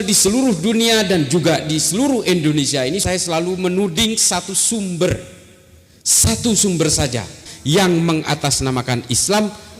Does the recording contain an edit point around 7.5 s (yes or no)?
yes